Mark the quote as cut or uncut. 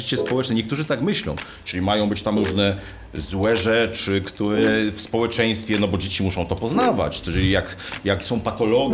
uncut